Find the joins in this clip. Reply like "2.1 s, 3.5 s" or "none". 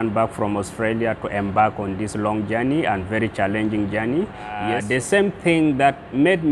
4.7 s